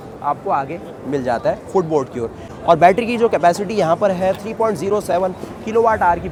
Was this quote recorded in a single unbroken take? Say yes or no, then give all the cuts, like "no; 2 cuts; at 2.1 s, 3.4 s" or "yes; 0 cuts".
yes; 0 cuts